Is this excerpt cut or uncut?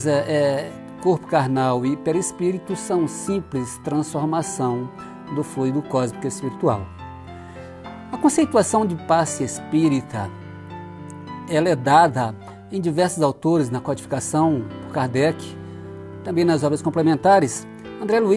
uncut